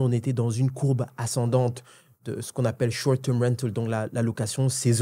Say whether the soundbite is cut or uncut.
cut